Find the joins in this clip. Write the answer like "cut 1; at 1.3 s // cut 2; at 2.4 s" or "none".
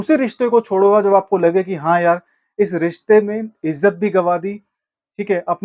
none